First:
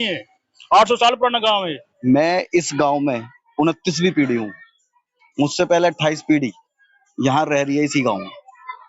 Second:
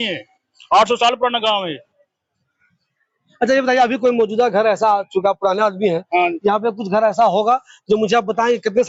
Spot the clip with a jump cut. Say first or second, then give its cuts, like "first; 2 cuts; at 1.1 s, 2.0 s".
first; 1 cut; at 1.8 s